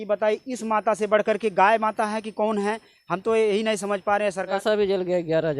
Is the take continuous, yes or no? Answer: no